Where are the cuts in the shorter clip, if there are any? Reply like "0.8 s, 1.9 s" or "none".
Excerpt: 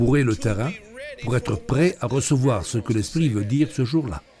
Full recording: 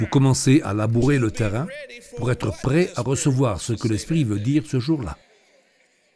none